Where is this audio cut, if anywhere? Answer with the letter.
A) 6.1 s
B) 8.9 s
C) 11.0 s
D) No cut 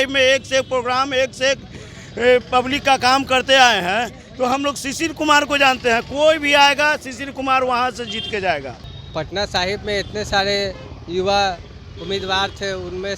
B